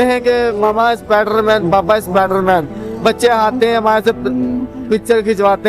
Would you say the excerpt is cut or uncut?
uncut